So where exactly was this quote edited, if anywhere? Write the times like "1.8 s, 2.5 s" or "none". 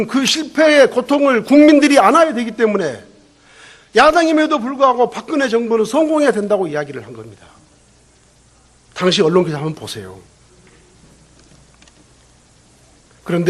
12.0 s